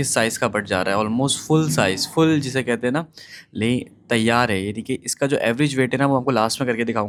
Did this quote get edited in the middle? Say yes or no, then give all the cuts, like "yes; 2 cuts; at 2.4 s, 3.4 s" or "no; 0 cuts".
no; 0 cuts